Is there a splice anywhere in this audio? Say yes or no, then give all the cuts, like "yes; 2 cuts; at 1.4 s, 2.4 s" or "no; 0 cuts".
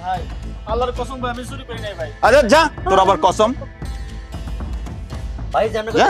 no; 0 cuts